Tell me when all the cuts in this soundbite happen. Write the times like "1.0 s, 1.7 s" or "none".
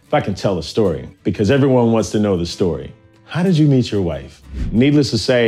1.1 s, 4.6 s